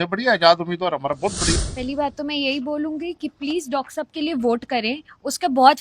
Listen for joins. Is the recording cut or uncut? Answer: cut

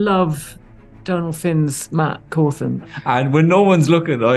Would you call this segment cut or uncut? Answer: cut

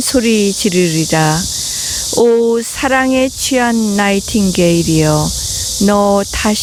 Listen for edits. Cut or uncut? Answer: uncut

